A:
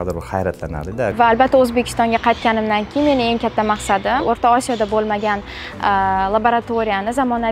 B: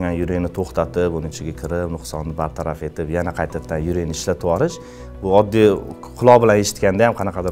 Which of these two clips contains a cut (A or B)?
A